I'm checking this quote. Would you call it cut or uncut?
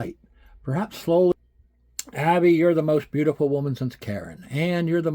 cut